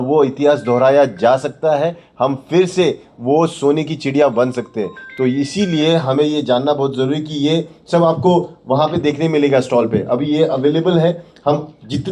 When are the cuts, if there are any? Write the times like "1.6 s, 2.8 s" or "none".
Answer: none